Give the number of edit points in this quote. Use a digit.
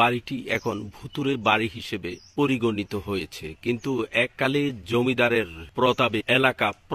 1